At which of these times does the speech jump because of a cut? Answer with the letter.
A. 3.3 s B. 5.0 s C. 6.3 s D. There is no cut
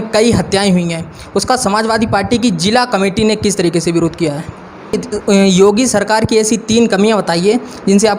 B